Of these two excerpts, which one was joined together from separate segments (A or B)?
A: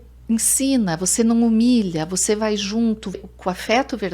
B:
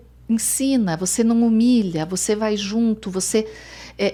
A